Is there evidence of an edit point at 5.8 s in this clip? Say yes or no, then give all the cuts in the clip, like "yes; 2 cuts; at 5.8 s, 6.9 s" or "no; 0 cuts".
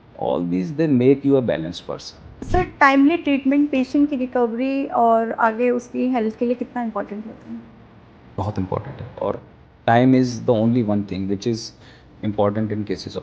no; 1 cut; at 2.4 s